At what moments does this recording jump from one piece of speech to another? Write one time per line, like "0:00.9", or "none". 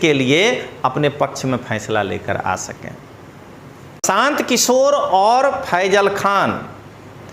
0:04.0